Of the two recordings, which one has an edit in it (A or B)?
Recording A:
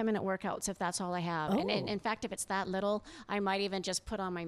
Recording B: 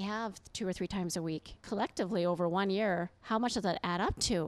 B